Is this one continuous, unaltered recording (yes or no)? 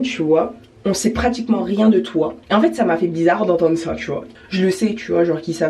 no